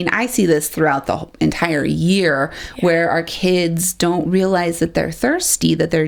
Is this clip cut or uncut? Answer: uncut